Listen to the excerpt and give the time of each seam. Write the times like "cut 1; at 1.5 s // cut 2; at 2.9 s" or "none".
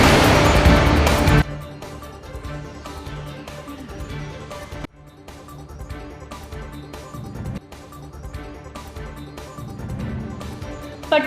cut 1; at 1.1 s